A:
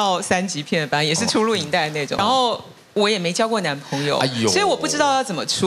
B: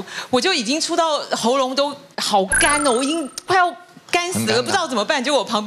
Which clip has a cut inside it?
A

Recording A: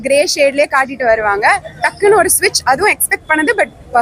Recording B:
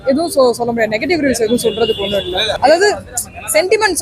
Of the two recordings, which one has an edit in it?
B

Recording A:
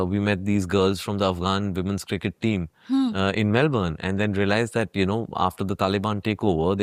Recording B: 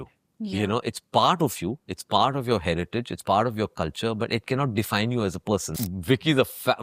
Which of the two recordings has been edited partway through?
B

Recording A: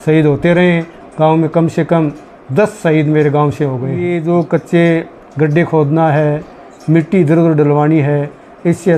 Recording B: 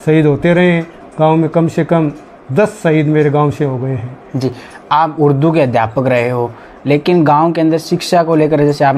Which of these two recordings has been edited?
A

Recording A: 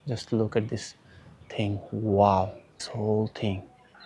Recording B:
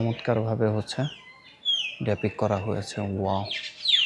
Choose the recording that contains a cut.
A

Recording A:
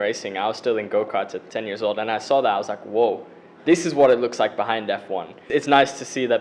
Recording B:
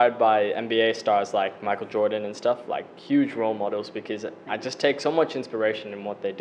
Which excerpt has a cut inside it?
A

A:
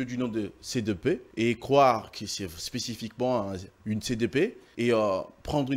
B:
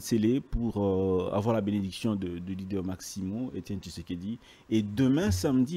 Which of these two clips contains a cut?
A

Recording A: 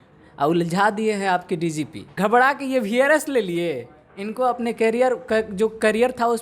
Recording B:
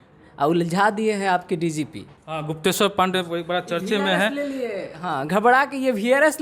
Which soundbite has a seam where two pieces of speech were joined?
A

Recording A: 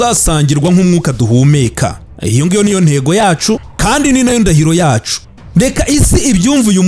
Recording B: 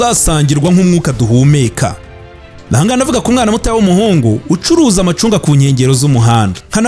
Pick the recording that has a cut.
B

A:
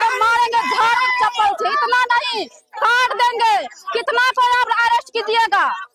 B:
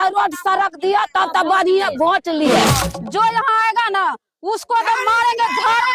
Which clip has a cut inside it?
B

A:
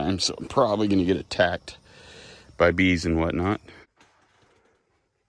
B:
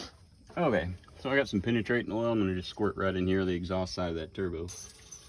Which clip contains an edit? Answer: A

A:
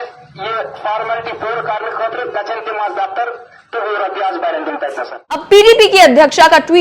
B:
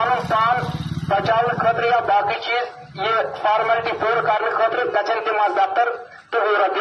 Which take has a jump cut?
A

